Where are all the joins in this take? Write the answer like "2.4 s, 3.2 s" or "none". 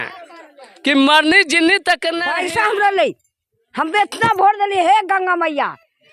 2.2 s